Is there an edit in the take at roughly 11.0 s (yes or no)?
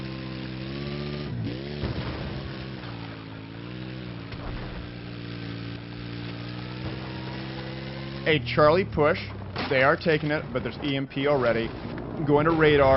yes